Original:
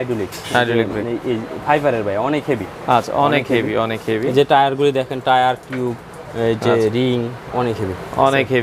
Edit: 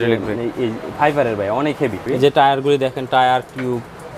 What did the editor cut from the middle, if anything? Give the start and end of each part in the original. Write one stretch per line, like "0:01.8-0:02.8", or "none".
0:02.7-0:04.2